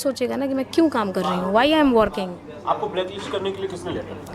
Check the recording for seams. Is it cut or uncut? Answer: uncut